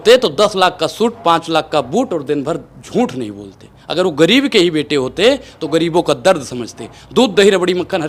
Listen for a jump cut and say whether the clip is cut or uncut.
uncut